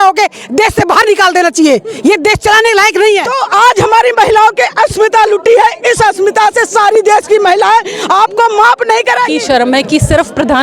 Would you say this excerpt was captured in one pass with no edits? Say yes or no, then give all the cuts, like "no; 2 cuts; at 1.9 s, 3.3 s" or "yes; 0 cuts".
no; 2 cuts; at 3.3 s, 9.3 s